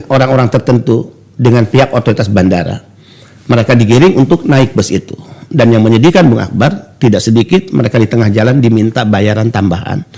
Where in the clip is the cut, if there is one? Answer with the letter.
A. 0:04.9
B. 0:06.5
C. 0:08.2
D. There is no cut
D